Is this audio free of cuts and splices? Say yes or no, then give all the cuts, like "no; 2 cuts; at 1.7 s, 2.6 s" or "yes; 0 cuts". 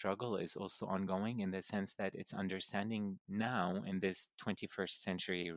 yes; 0 cuts